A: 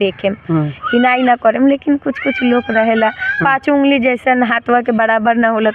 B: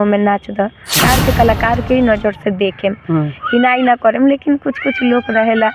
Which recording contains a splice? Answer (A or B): B